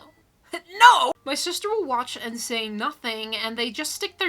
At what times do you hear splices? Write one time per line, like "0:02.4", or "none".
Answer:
0:01.2